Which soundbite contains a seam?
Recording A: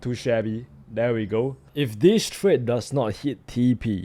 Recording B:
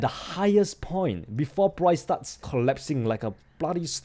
B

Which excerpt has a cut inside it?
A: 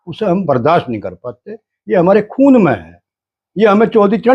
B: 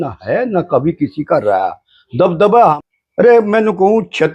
B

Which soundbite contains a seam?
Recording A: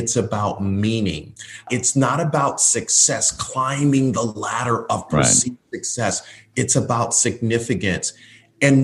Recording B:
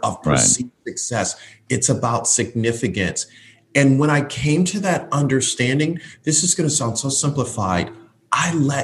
A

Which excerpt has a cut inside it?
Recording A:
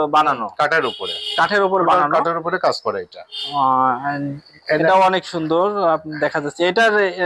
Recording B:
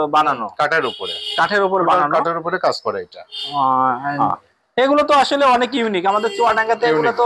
B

